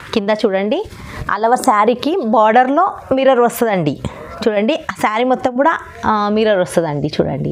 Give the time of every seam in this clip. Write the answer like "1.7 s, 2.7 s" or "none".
none